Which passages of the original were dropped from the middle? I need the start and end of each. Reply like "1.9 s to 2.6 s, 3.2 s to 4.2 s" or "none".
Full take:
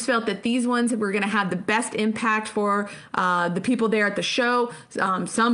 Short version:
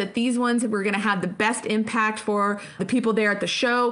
3.1 s to 3.5 s